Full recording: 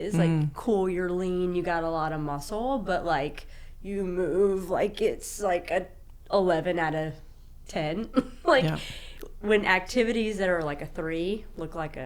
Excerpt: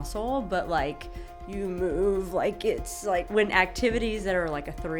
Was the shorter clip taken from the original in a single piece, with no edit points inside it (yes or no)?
no